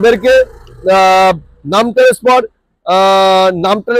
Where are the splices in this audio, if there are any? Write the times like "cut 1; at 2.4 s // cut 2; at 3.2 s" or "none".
none